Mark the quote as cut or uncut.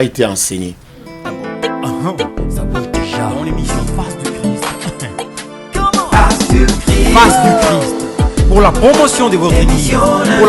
cut